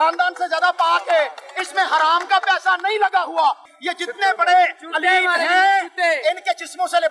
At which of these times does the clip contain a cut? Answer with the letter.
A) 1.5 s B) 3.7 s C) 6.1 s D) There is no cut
B